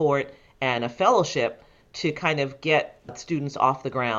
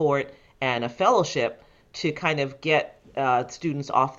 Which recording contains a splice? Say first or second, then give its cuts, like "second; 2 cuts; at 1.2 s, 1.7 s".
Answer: first; 1 cut; at 3.1 s